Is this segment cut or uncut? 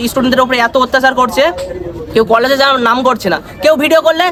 uncut